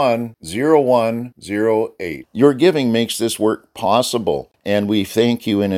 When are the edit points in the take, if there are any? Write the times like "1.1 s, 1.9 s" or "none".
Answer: 4.5 s